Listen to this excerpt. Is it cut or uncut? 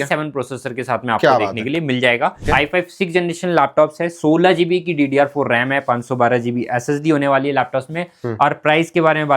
cut